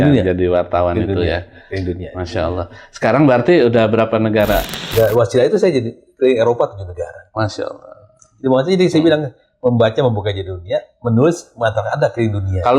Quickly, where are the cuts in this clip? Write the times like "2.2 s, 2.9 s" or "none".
4.8 s